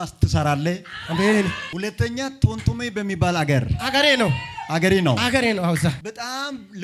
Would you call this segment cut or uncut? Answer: cut